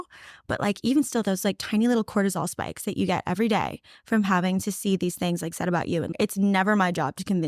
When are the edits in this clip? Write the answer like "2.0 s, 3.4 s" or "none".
6.1 s